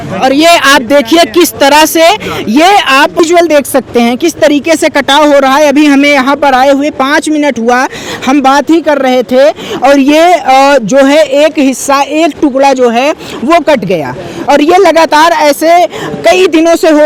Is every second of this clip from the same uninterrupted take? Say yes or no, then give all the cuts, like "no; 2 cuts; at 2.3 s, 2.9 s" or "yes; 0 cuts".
yes; 0 cuts